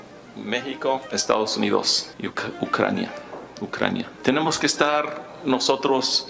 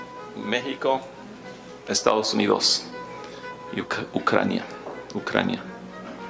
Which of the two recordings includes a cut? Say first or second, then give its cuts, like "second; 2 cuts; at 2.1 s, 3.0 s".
first; 3 cuts; at 1.1 s, 2.0 s, 4.1 s